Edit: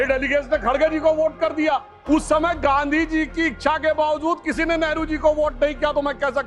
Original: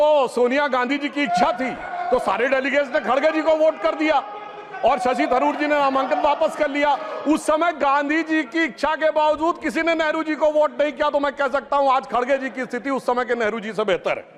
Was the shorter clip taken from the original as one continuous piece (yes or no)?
no